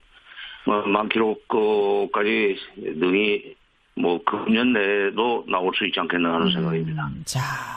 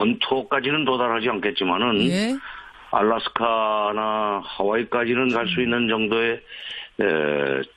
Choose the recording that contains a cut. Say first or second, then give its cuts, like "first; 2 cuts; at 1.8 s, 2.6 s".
first; 1 cut; at 2.0 s